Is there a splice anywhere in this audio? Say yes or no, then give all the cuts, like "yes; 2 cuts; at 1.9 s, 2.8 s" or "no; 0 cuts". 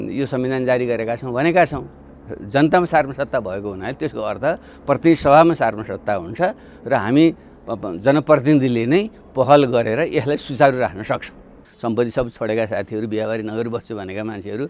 yes; 1 cut; at 11.7 s